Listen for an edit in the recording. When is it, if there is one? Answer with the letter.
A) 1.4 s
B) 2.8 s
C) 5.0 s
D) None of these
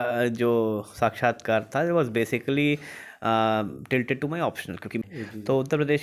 C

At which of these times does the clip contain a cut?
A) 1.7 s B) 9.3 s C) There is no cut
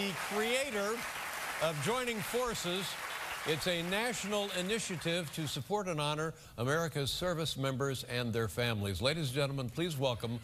C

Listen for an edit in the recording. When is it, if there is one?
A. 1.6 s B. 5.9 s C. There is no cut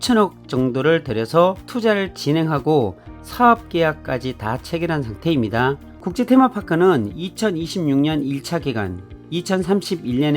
B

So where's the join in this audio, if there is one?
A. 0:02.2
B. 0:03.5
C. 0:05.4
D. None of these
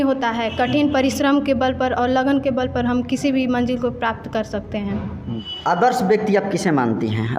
C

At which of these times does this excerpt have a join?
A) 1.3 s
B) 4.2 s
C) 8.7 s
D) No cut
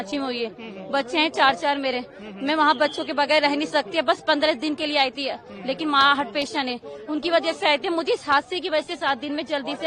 D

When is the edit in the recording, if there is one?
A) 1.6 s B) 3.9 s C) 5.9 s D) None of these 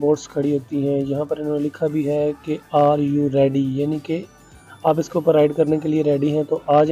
D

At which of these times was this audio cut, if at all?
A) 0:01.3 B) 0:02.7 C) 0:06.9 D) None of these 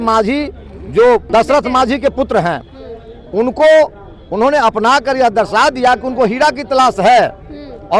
A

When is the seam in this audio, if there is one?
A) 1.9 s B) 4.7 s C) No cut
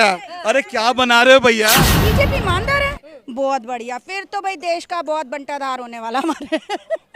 A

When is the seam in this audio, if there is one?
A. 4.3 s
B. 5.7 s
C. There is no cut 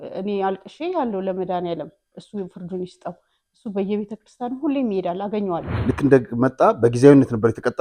B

